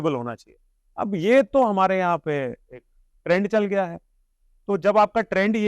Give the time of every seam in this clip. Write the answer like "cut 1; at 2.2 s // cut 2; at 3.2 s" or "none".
none